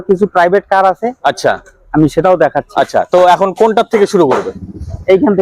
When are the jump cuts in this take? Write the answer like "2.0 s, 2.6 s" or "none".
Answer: none